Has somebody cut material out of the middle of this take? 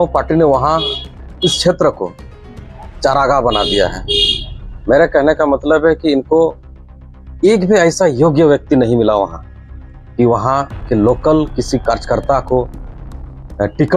no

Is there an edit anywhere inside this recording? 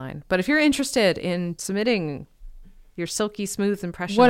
yes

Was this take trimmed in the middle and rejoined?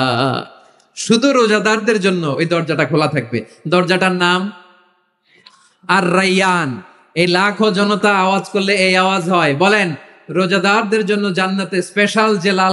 no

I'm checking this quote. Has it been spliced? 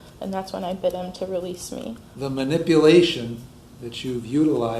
yes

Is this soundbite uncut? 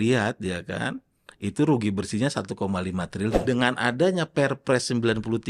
no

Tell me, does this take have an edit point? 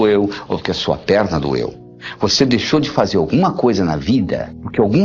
no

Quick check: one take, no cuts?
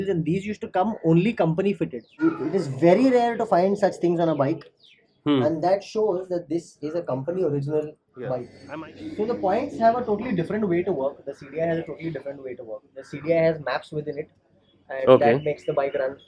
no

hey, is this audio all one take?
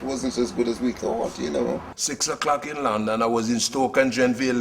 no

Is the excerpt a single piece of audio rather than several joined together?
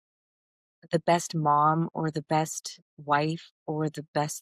yes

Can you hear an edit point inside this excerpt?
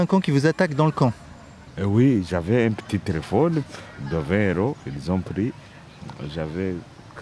no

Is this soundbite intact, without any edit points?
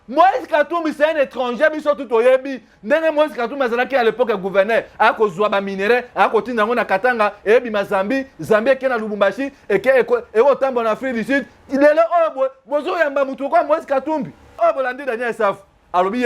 no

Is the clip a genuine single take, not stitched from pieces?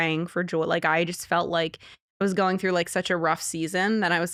yes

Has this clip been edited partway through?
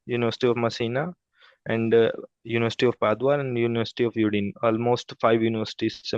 no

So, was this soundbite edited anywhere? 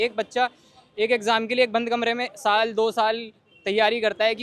no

